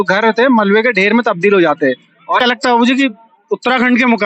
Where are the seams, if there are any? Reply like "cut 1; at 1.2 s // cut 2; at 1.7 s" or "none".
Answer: cut 1; at 2.4 s